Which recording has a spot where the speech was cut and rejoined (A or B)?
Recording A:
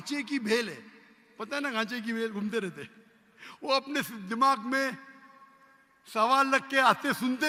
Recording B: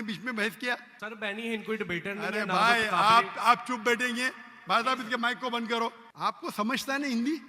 B